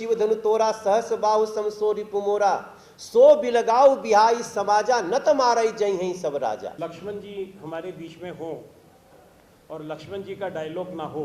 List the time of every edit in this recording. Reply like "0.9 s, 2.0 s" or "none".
6.7 s